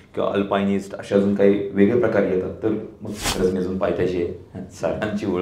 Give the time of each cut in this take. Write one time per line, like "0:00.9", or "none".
0:03.2